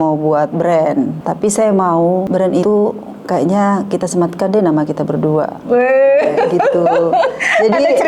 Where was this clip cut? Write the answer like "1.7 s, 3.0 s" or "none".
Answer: 1.2 s, 2.5 s